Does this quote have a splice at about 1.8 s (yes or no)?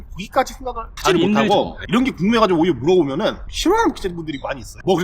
yes